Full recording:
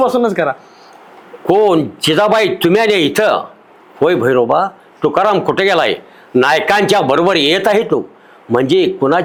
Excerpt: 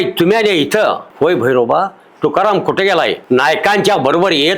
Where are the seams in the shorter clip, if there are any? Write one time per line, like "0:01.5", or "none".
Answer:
0:01.1
0:03.2